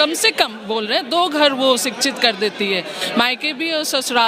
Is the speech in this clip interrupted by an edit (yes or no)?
no